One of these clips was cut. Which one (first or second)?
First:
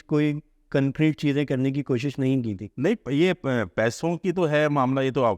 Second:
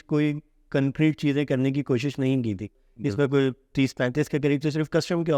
second